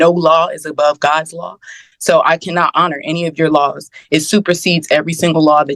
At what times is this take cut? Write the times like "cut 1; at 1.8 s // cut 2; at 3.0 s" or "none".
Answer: none